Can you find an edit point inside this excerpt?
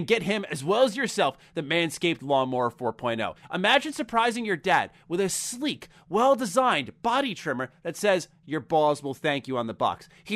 yes; 1 cut; at 3.4 s

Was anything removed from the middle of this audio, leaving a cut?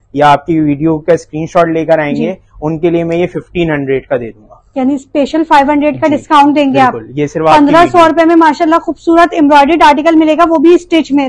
no; 0 cuts

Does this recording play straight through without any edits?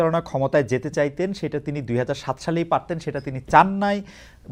yes; 0 cuts

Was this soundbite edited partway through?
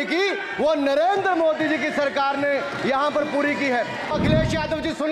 yes; 1 cut; at 4.1 s

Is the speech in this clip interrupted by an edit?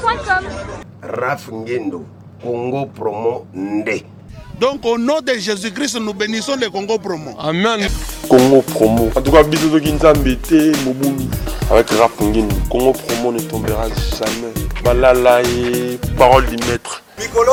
no; 0 cuts

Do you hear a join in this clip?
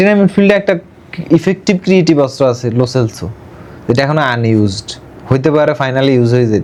no; 0 cuts

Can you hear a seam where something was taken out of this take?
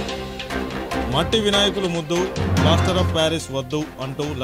yes; 1 cut; at 1.0 s

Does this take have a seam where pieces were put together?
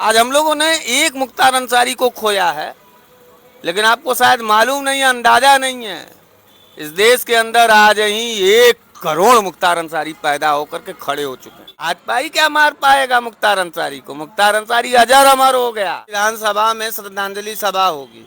yes; 2 cuts; at 11.9 s, 16.2 s

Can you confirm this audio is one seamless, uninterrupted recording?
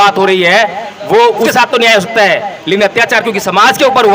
no; 1 cut; at 1.5 s

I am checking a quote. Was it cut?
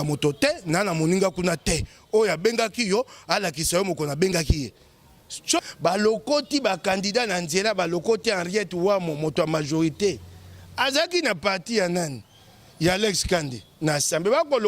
yes; 1 cut; at 5.6 s

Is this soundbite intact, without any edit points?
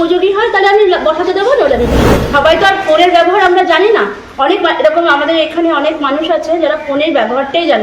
no; 1 cut; at 2.3 s

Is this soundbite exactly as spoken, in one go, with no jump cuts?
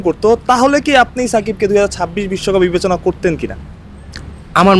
yes; 0 cuts

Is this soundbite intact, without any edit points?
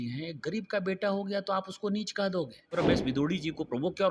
no; 1 cut; at 2.7 s

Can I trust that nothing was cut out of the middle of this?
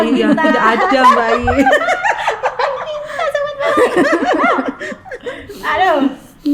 yes; 0 cuts

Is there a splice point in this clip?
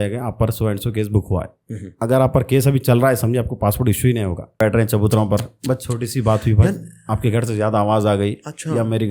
yes; 1 cut; at 4.6 s

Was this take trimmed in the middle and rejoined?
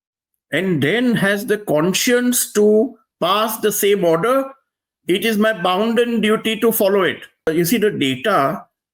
yes; 1 cut; at 7.5 s

